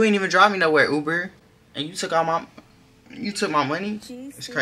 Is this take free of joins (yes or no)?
yes